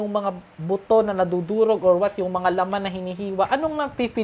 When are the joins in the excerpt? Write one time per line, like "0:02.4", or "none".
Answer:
none